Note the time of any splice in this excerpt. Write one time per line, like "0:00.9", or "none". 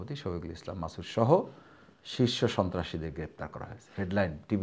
none